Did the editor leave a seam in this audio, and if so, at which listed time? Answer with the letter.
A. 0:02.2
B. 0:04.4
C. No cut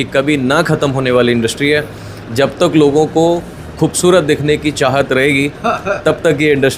C